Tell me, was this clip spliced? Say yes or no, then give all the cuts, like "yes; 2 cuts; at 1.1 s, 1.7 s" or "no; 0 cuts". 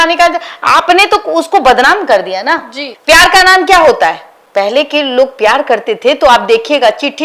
no; 0 cuts